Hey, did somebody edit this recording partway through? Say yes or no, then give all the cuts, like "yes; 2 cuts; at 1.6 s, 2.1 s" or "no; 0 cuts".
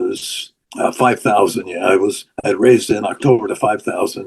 yes; 1 cut; at 2.3 s